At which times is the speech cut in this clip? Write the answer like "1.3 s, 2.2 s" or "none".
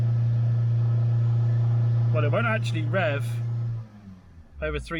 none